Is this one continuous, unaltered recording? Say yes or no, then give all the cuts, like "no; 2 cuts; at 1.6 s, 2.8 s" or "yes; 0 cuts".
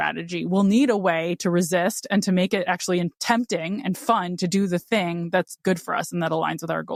yes; 0 cuts